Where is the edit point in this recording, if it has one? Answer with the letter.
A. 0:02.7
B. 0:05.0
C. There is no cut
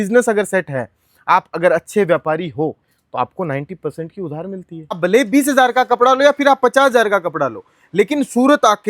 B